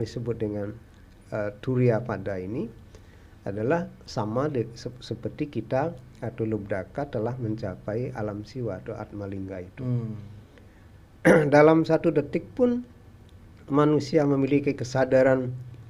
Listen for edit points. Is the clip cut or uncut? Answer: uncut